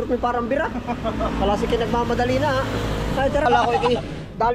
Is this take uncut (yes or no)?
no